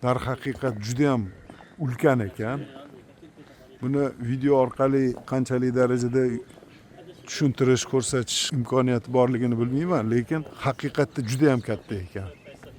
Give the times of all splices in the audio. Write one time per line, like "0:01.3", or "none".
0:08.4
0:10.5

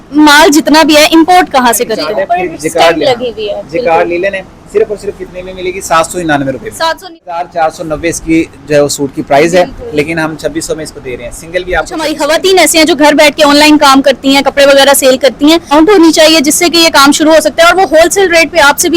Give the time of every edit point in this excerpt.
0:02.0
0:07.1
0:12.1
0:15.7

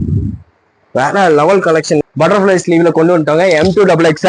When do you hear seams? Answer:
0:02.0

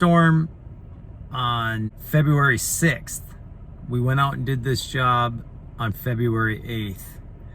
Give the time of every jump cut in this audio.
0:02.0

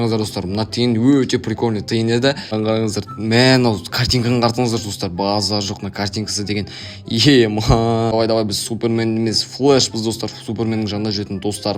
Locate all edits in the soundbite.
0:02.5
0:08.1

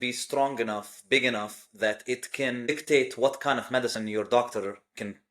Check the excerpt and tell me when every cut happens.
0:02.7

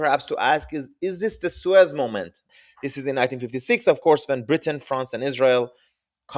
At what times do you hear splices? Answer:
0:02.5

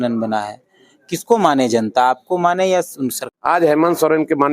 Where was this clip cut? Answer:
0:03.2

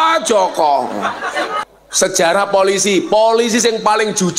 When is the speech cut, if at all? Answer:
0:01.6

